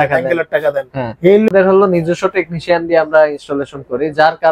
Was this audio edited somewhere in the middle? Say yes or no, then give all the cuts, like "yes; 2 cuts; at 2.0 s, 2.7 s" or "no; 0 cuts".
yes; 1 cut; at 1.5 s